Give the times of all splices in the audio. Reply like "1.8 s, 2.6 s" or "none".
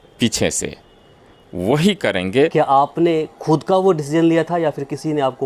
2.5 s